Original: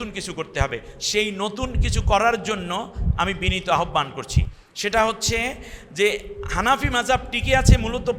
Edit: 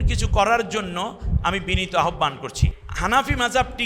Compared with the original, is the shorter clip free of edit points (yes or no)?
no